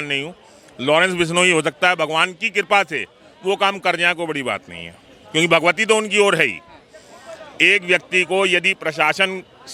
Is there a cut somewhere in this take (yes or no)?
no